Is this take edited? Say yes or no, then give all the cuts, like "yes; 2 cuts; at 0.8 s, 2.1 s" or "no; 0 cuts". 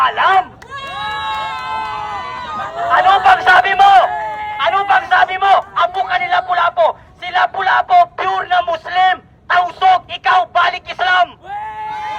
no; 0 cuts